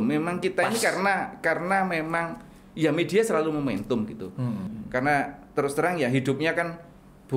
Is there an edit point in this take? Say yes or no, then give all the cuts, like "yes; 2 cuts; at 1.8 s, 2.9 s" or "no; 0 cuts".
yes; 1 cut; at 4.8 s